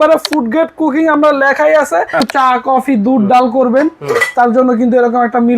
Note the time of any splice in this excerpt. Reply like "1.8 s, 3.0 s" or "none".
2.3 s

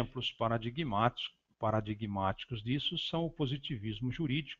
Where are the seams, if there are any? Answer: 1.3 s

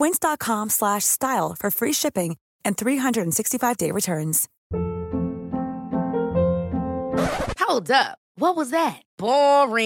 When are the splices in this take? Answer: none

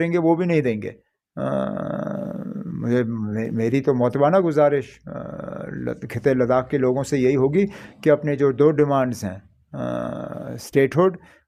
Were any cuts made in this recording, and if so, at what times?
none

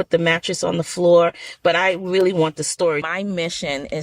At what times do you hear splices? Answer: 3.0 s

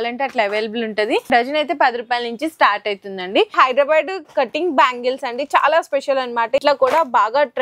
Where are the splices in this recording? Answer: 1.3 s, 3.5 s, 6.6 s

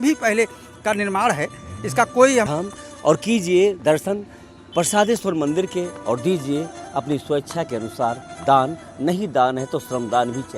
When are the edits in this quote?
2.5 s

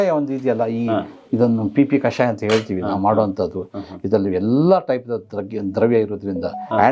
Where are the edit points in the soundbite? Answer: none

